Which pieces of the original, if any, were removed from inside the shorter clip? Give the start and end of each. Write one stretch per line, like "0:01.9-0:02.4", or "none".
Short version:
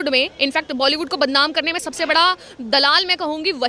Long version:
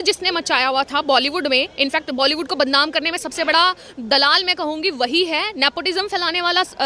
none